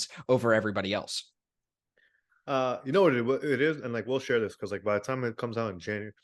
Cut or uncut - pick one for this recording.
uncut